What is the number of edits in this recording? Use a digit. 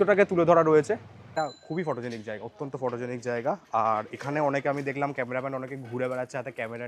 1